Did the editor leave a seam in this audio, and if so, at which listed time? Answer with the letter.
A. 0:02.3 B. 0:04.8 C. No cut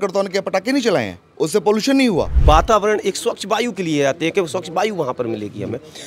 A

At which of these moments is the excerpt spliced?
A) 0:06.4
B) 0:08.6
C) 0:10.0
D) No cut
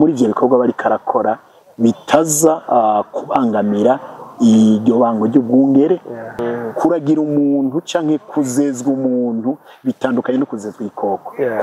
A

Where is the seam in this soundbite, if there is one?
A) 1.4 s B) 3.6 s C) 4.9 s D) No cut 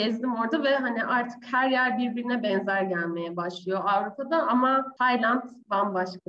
C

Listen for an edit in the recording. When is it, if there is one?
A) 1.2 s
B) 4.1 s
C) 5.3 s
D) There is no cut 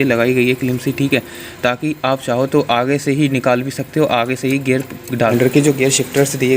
C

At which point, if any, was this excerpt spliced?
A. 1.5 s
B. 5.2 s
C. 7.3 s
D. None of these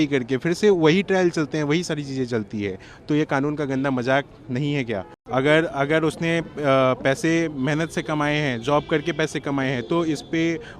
B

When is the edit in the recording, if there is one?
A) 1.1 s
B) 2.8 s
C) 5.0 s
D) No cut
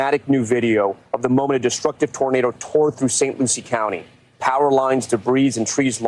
D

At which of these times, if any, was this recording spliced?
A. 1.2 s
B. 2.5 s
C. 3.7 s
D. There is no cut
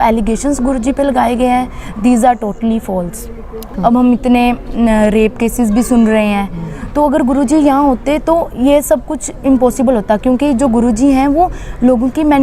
C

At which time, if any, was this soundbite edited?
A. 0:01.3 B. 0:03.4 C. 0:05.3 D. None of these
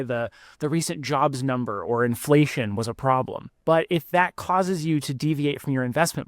B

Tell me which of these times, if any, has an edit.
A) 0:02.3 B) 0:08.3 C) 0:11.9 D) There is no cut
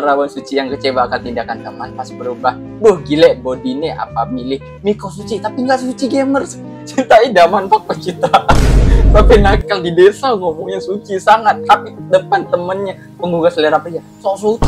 D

